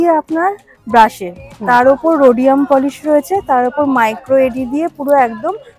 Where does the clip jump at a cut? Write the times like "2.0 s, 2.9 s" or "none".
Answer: none